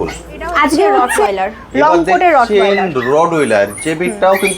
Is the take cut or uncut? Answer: cut